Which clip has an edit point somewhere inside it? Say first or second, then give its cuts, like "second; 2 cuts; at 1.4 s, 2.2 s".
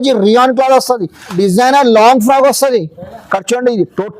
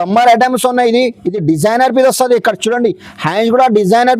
first; 1 cut; at 1.4 s